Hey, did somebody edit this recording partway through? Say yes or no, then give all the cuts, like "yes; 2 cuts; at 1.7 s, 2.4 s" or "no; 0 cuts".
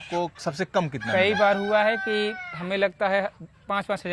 no; 0 cuts